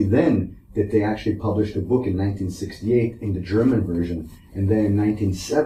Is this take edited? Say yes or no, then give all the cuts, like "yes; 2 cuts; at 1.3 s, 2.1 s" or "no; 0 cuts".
no; 0 cuts